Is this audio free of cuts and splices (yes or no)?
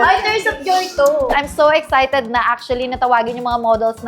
no